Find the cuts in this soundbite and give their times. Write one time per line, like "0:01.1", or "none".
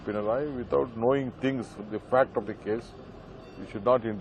none